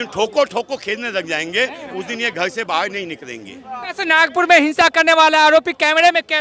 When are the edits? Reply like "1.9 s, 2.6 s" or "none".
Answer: 3.9 s